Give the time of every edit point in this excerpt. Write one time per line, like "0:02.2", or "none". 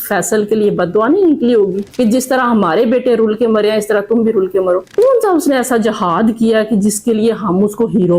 none

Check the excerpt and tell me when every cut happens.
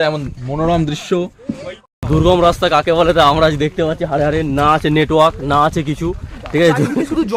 0:01.9

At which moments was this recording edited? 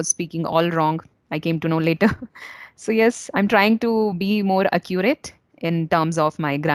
none

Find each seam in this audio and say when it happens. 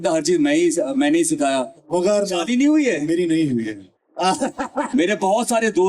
0:01.8
0:04.9

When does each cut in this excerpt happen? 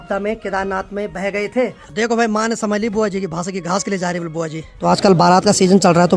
0:01.8
0:04.7

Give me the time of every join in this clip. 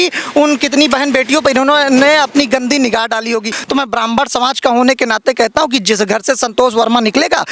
0:03.6

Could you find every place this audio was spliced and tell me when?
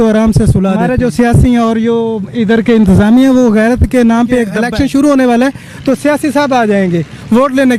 0:00.8
0:04.6

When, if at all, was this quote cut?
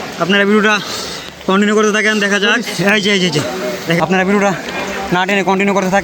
0:04.0

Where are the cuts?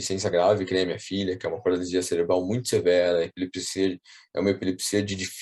none

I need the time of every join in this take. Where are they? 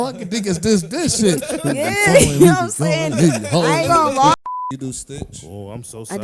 0:04.4

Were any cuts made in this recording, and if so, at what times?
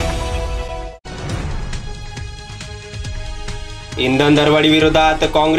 0:00.9
0:02.9
0:04.0

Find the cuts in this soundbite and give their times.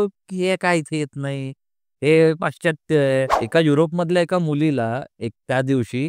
0:03.4

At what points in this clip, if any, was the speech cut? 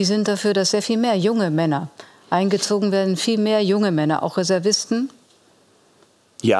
none

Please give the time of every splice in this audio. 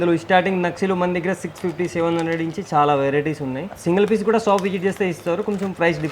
0:03.6

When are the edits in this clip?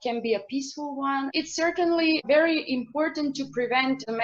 0:01.3

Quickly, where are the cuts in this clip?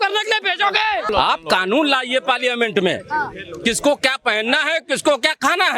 0:01.1

